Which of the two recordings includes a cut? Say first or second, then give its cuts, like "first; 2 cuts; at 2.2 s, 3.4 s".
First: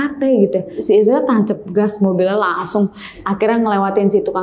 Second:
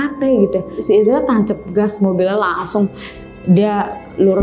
first; 1 cut; at 3.2 s